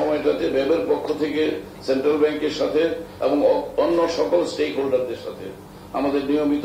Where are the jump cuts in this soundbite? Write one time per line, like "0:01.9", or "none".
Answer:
none